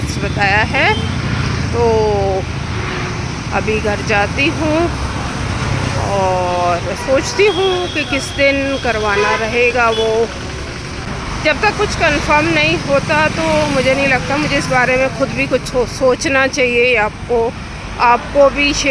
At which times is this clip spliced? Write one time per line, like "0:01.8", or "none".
none

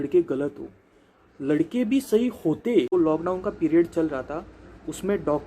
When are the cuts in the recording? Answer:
0:02.9

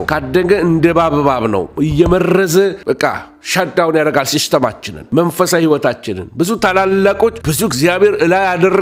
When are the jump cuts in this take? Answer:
none

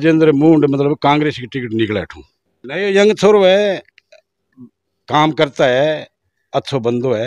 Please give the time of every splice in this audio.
0:02.7

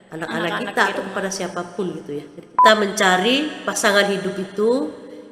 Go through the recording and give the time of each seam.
0:02.4

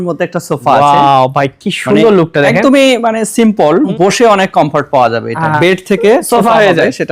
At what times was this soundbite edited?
0:03.9
0:05.4

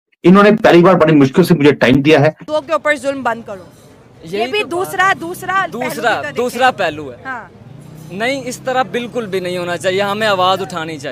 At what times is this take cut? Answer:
0:02.4

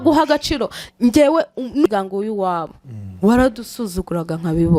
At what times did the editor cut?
0:01.9

